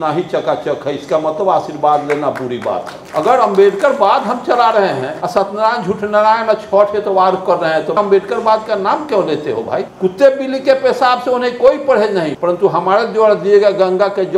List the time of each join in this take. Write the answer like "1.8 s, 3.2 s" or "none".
3.0 s, 5.1 s, 9.9 s, 12.3 s